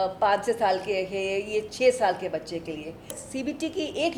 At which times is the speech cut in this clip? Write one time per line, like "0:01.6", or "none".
0:03.2

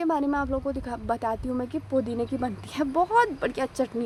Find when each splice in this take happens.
none

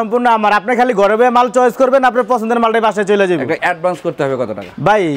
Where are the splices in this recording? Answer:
0:03.6

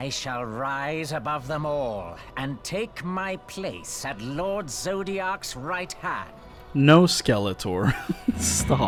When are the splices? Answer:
none

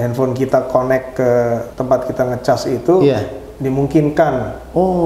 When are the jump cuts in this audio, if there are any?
0:01.7

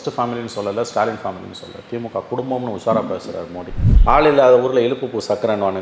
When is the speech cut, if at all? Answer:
0:03.9

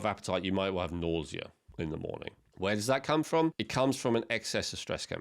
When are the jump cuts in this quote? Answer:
0:01.6
0:02.4
0:03.6

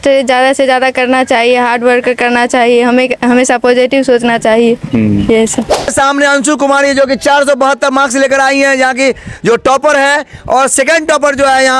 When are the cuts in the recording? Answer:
0:05.9

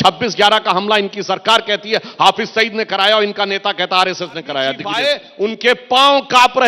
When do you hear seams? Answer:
0:04.9

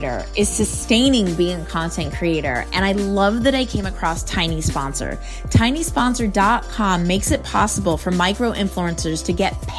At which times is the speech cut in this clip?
none

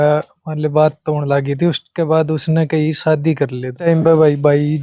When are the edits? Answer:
0:03.9

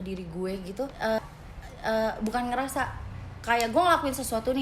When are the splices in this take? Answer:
0:01.2

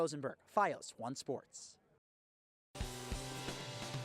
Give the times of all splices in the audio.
0:02.8

